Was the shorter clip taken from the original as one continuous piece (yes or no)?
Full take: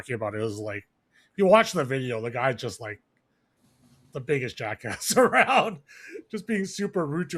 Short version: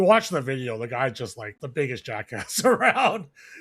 no